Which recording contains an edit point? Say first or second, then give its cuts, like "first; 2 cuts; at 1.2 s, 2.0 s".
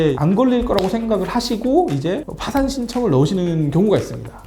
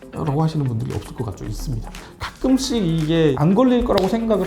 second; 1 cut; at 2.1 s